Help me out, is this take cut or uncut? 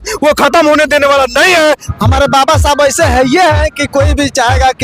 cut